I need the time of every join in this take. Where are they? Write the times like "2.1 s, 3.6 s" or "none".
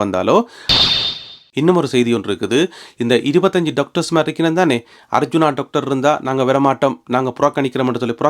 0.9 s